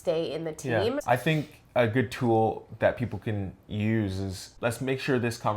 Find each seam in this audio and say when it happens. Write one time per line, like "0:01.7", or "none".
0:01.0
0:04.5